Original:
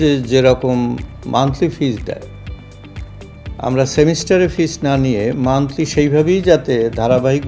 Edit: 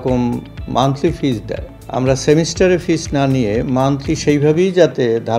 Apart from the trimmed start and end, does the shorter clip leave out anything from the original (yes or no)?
yes